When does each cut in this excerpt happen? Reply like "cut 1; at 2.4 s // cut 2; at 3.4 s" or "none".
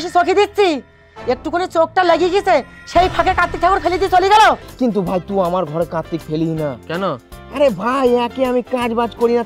cut 1; at 4.7 s